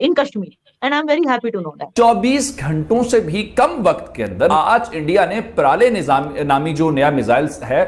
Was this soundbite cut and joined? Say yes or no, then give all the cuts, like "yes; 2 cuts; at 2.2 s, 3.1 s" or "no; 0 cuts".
yes; 2 cuts; at 1.9 s, 4.5 s